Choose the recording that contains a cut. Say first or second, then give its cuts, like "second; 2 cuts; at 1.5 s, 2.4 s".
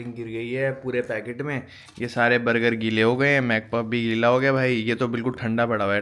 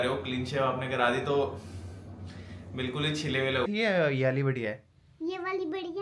second; 1 cut; at 3.7 s